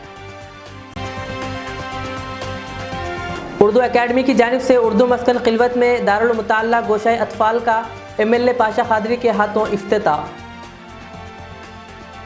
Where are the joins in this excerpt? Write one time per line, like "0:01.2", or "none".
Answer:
none